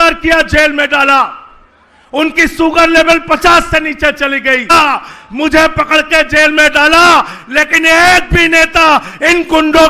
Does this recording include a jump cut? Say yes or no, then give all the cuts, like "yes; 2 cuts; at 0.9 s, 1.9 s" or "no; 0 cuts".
yes; 1 cut; at 4.7 s